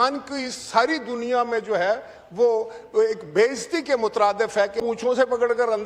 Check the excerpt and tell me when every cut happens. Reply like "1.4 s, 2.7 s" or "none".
4.8 s